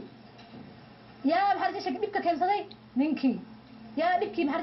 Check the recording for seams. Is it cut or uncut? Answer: uncut